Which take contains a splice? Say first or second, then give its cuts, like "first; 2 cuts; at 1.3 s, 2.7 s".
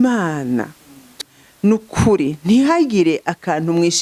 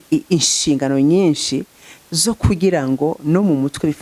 first; 1 cut; at 1.2 s